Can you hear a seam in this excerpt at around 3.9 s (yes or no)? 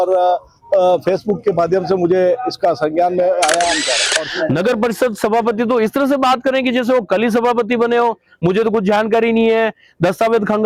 yes